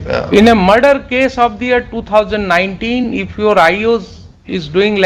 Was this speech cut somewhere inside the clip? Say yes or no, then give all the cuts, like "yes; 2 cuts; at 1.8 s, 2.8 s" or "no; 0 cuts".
no; 0 cuts